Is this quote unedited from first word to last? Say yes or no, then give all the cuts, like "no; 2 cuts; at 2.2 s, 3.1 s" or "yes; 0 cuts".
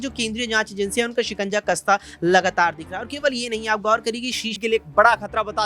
no; 1 cut; at 4.5 s